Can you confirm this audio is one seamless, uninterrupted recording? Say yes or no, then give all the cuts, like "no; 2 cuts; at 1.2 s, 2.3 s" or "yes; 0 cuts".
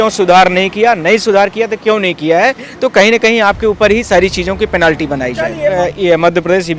no; 1 cut; at 5.8 s